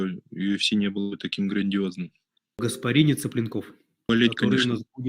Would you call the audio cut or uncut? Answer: cut